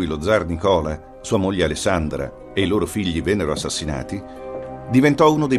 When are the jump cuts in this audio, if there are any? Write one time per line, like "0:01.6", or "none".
0:02.0